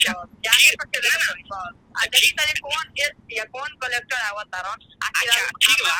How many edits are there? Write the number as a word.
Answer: zero